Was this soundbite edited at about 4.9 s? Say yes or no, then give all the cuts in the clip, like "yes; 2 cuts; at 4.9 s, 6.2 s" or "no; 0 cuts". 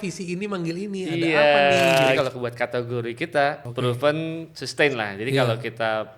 no; 2 cuts; at 2.2 s, 3.7 s